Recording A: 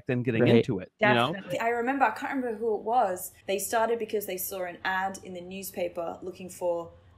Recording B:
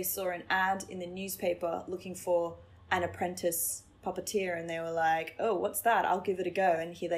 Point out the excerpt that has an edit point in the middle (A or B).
A